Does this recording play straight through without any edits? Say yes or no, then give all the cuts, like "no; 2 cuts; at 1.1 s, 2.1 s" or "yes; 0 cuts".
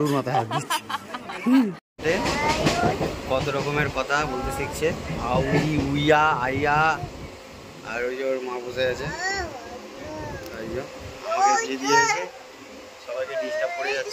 no; 1 cut; at 1.8 s